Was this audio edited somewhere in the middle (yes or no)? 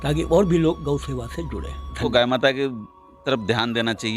yes